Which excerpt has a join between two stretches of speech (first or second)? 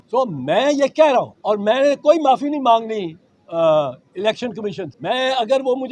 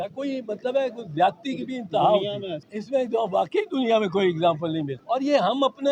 first